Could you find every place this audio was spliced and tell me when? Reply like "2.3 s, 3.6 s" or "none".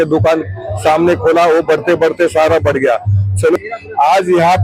3.6 s